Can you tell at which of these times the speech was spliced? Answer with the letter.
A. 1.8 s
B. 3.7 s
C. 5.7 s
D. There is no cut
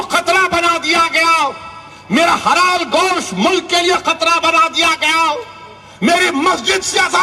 D